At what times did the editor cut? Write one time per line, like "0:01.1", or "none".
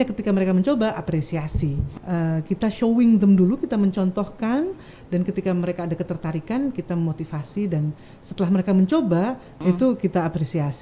0:01.9
0:09.6